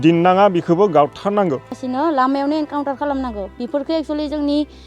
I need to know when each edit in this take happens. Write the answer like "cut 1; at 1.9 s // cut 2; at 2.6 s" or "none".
cut 1; at 1.8 s